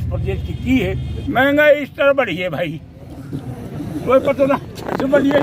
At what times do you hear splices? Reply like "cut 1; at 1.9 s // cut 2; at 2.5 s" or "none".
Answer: cut 1; at 1.1 s